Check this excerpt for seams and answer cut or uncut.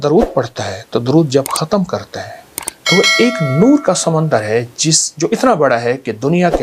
uncut